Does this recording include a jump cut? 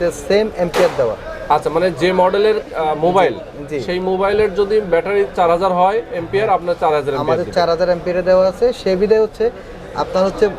no; 0 cuts

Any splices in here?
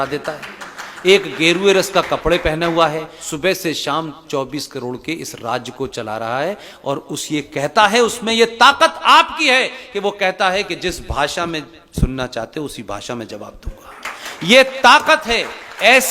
yes; 1 cut; at 3.2 s

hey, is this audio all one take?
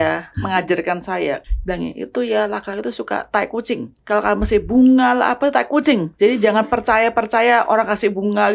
no; 2 cuts; at 1.4 s, 3.9 s

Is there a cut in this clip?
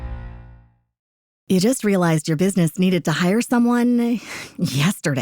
yes; 1 cut; at 1.0 s

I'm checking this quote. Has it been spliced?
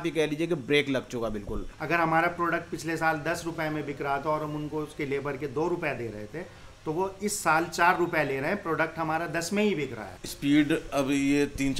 yes; 2 cuts; at 1.7 s, 9.9 s

